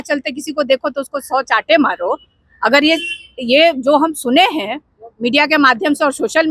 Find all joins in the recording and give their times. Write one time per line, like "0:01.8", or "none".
none